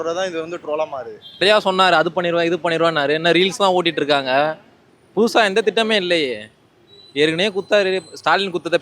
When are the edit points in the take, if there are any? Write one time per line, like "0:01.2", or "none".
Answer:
0:01.4